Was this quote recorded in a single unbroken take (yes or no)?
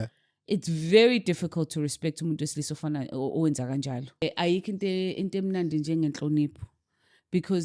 no